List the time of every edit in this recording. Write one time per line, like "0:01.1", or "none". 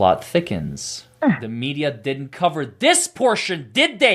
none